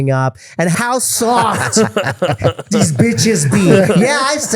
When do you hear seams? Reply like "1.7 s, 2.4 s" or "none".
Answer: 0.9 s